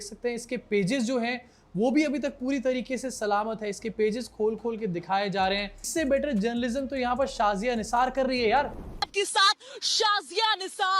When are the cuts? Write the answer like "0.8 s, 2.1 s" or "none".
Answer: 5.9 s